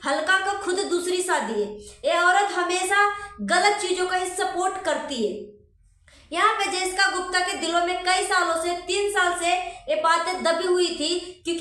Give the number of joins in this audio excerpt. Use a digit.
0